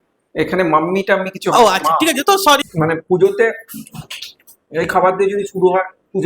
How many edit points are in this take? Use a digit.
1